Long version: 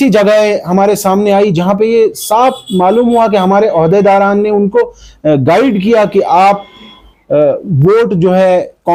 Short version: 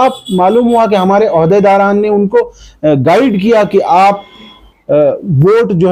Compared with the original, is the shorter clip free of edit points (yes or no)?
yes